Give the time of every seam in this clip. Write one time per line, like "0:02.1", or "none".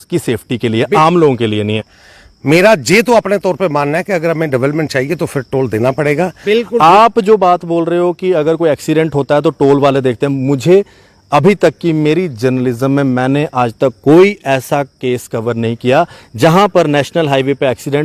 0:01.8
0:06.4